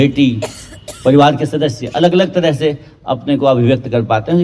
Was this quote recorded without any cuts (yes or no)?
yes